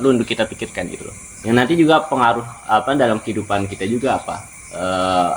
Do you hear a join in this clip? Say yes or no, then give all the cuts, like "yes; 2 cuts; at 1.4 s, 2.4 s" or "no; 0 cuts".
yes; 1 cut; at 1.4 s